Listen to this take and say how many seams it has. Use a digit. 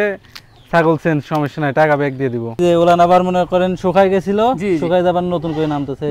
1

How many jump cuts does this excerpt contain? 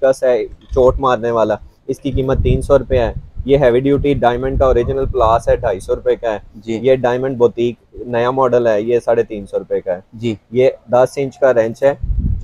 0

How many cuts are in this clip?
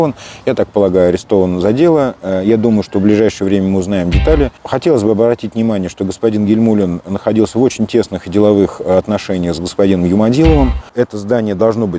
2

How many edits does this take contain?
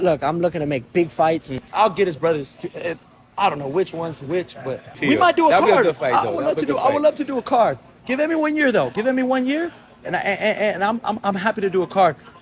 2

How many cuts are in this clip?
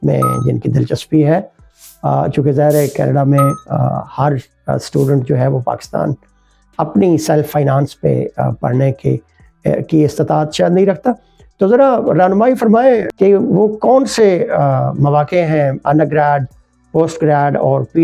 0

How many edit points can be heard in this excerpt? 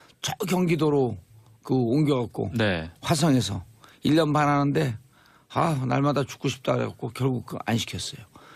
1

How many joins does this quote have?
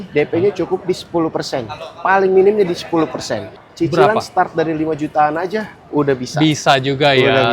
1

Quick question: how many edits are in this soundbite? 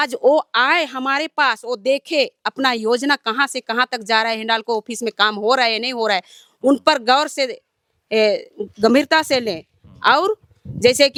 0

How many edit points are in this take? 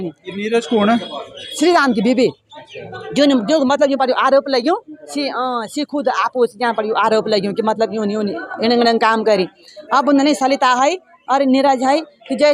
0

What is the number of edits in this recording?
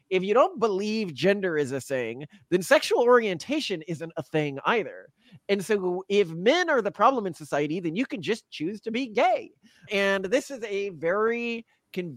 0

